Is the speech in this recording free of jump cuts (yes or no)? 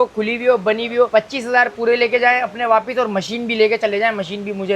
yes